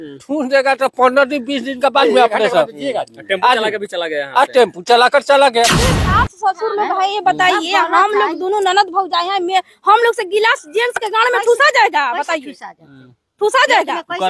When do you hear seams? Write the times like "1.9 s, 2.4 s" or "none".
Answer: 5.8 s

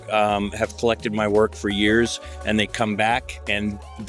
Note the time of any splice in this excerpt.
none

